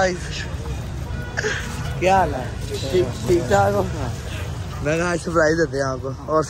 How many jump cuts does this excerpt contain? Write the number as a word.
zero